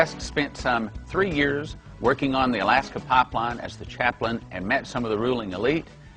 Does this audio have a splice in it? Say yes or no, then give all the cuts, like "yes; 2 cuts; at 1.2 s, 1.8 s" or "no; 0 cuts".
no; 0 cuts